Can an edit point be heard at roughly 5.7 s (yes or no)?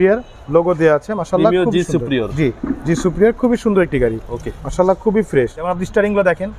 yes